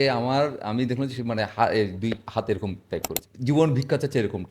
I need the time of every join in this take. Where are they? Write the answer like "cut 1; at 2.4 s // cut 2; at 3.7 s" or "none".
cut 1; at 3.2 s